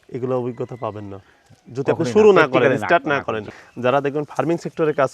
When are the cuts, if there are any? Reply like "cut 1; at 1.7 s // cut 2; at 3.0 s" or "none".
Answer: cut 1; at 3.5 s